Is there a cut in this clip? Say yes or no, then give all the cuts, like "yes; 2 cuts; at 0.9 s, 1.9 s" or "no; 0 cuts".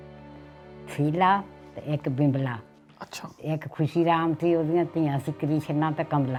no; 0 cuts